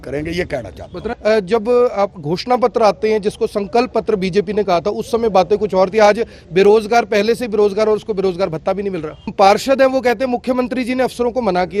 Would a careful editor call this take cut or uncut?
cut